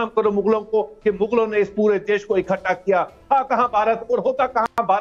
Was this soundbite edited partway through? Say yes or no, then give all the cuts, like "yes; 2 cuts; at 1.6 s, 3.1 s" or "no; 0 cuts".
no; 0 cuts